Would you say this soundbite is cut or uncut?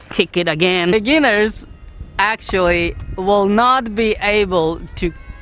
cut